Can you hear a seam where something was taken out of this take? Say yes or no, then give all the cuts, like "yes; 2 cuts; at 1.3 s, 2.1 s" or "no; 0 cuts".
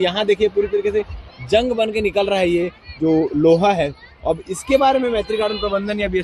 no; 0 cuts